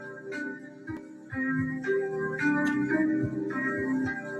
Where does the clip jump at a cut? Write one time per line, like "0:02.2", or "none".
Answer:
0:01.0